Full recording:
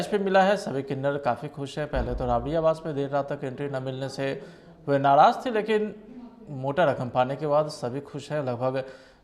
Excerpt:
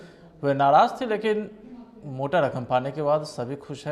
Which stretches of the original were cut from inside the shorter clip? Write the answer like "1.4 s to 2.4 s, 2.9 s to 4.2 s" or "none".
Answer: none